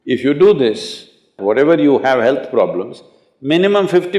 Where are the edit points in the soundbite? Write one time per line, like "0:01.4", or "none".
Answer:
0:01.4